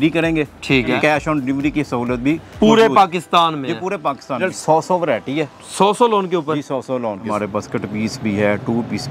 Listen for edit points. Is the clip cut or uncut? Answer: cut